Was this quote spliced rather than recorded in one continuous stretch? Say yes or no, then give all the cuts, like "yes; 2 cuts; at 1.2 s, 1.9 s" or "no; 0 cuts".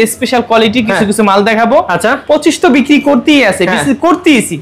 no; 0 cuts